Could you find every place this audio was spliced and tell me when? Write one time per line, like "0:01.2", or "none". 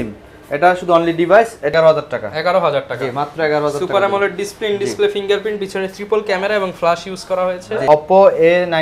0:01.7
0:07.8